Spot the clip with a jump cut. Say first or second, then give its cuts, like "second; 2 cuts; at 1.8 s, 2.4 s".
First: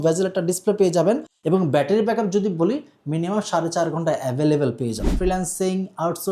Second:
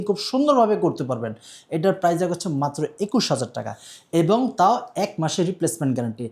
first; 2 cuts; at 1.3 s, 5.1 s